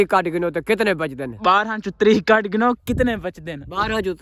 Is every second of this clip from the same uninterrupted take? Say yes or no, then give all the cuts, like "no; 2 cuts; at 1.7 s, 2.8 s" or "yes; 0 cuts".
yes; 0 cuts